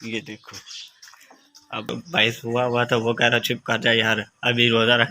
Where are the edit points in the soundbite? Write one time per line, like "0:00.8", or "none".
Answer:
0:01.9